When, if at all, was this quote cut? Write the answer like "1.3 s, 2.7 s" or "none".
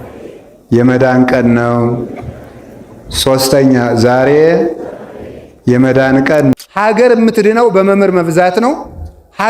6.5 s